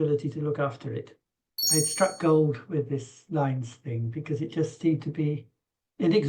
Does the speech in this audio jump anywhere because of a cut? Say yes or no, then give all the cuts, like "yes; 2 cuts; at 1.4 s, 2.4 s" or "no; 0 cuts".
yes; 1 cut; at 1.6 s